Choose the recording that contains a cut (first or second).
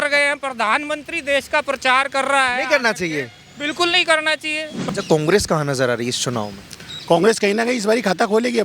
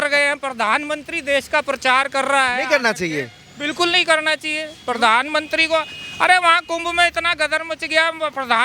first